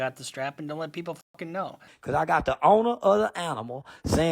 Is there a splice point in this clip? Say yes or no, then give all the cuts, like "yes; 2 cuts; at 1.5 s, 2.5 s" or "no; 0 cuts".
yes; 1 cut; at 1.9 s